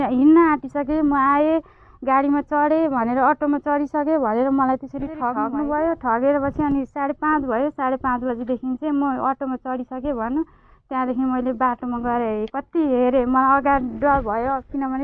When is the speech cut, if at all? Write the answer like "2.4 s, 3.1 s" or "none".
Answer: 5.3 s